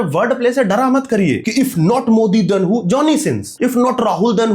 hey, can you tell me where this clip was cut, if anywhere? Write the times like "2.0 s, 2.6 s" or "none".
1.4 s, 3.5 s